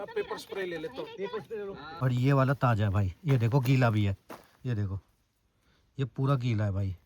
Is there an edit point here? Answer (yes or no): yes